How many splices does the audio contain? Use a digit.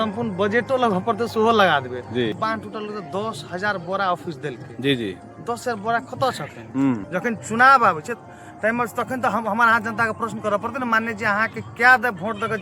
2